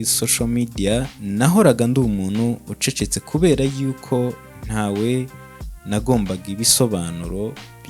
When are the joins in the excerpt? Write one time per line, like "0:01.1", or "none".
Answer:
0:01.2